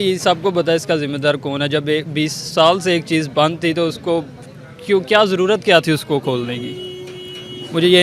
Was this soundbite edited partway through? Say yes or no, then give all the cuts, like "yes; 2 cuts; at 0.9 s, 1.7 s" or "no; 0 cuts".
no; 0 cuts